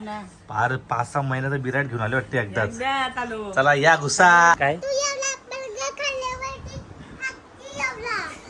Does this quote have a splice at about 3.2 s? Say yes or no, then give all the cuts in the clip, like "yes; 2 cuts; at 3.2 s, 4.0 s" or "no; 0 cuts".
no; 1 cut; at 4.6 s